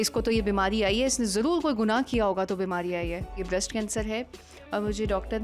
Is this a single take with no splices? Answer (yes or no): no